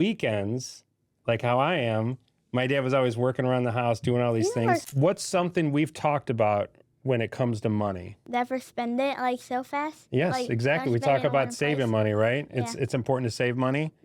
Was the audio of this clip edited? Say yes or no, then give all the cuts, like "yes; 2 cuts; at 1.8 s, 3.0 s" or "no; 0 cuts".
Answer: yes; 2 cuts; at 4.9 s, 8.1 s